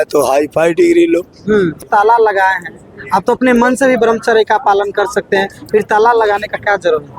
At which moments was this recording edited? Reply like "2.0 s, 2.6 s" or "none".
1.8 s